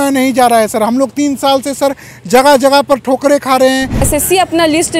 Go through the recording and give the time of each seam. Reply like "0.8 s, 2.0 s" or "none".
4.1 s